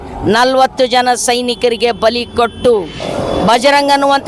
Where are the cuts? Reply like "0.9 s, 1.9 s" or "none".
3.0 s